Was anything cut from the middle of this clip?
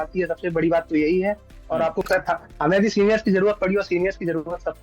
yes; 1 cut; at 2.1 s

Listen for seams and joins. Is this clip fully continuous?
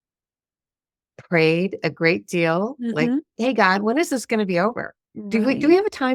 yes; 0 cuts

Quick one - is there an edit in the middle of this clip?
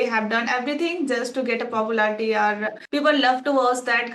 yes; 1 cut; at 2.7 s

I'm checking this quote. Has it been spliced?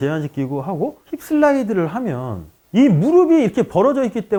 no; 0 cuts

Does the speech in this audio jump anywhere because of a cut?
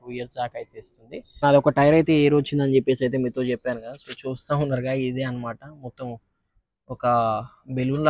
yes; 1 cut; at 1.4 s

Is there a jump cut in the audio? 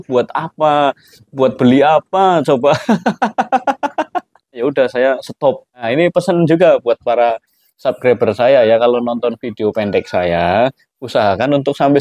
yes; 2 cuts; at 4.6 s, 5.9 s

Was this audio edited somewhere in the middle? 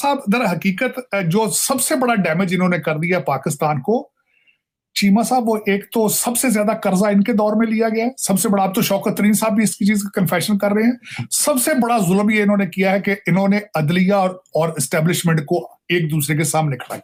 no; 0 cuts

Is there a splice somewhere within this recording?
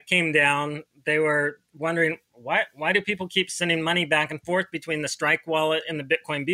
no; 0 cuts

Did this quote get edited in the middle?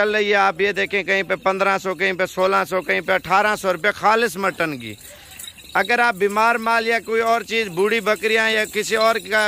no; 0 cuts

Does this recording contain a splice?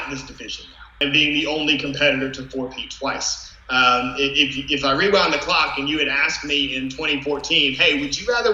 yes; 1 cut; at 0.9 s

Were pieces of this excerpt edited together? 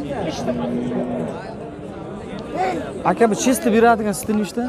no; 0 cuts

